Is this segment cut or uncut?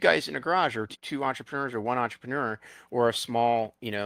cut